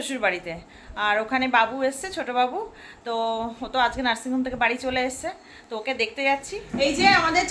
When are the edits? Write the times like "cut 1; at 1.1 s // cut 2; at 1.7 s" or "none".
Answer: cut 1; at 6.6 s